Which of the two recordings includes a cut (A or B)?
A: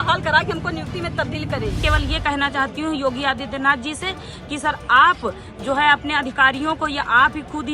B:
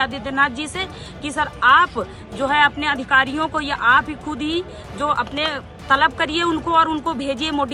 A